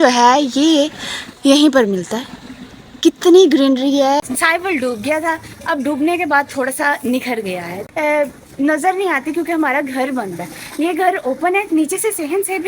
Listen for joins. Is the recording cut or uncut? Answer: cut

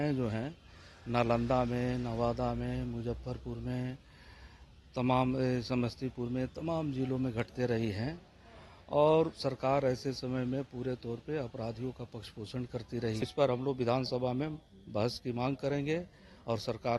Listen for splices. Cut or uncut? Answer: cut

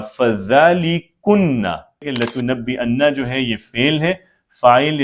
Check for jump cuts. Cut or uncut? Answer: cut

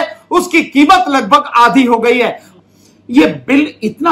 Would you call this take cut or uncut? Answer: cut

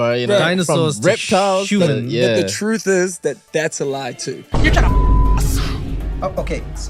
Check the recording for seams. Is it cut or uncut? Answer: uncut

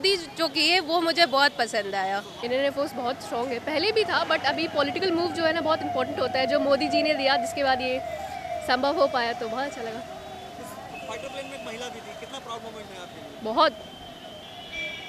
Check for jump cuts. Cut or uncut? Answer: uncut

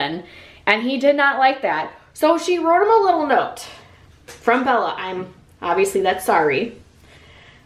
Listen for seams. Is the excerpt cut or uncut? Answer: uncut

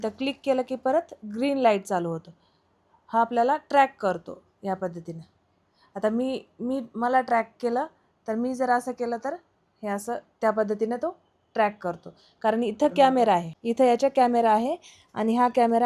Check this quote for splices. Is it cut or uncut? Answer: uncut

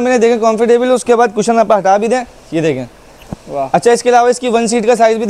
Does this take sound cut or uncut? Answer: uncut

